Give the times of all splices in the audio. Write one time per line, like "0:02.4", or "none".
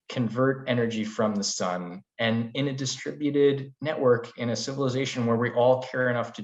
none